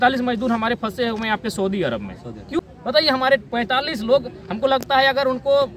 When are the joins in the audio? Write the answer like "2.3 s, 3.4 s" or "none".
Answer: 2.6 s

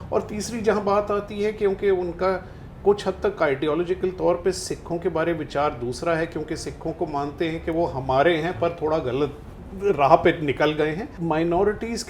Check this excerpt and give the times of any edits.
11.1 s

